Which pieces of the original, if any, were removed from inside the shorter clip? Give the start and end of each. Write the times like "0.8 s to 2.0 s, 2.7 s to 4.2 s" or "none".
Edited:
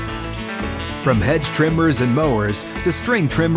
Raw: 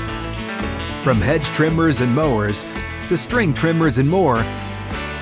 2.7 s to 2.9 s